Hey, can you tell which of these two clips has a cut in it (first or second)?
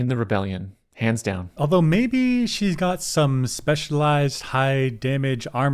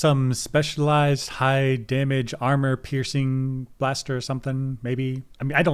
first